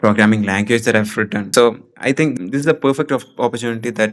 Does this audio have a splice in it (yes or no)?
yes